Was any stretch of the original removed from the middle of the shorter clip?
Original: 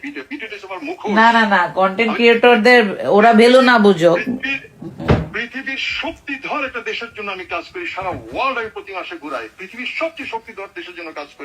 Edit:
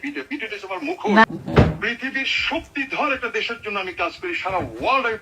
yes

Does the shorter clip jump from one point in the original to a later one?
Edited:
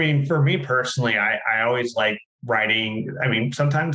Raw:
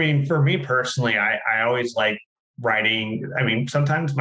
yes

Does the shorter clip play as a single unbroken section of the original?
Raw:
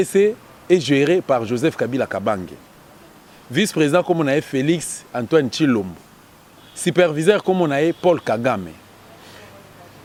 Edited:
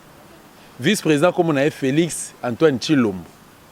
yes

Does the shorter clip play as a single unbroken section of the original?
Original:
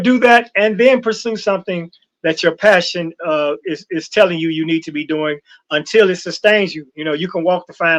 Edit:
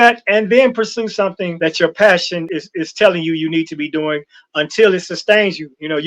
no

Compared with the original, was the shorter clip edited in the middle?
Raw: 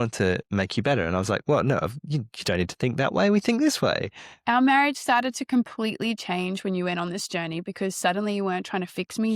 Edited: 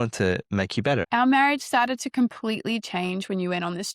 yes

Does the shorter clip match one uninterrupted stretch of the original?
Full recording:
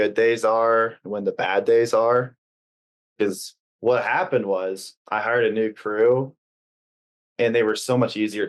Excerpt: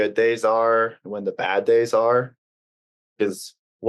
yes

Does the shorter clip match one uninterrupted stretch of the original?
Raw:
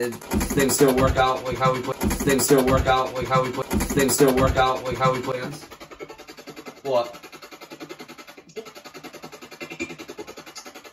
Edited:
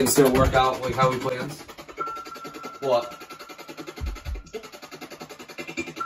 no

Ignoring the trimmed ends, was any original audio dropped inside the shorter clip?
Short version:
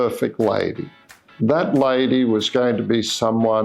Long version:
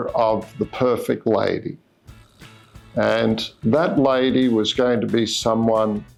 yes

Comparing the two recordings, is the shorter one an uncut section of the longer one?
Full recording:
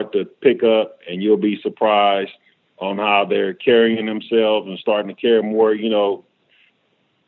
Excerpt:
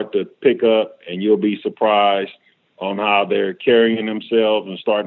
yes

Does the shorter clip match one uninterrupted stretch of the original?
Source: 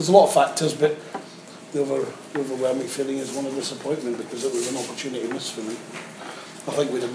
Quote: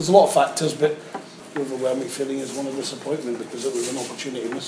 no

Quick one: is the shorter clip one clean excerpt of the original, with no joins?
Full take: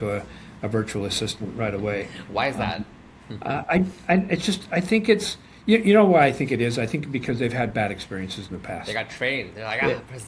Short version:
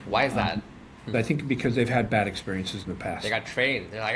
no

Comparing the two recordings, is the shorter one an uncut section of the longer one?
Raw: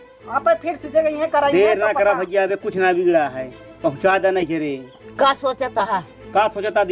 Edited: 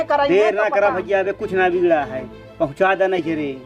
yes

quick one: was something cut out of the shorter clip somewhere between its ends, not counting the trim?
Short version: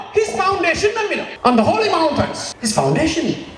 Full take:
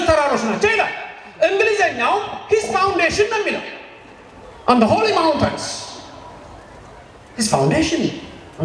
yes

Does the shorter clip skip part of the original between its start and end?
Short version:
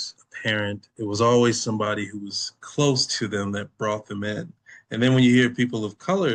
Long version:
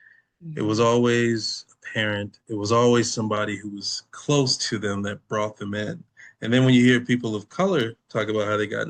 no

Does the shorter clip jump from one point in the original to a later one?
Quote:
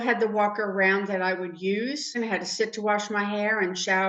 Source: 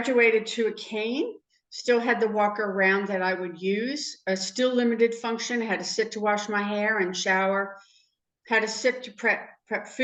yes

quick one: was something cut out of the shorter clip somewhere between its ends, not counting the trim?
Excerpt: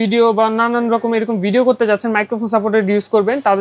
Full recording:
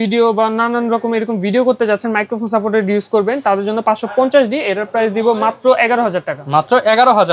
no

